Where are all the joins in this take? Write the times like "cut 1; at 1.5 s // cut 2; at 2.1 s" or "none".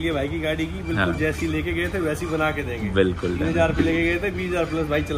none